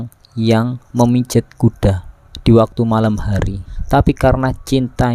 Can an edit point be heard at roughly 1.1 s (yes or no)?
no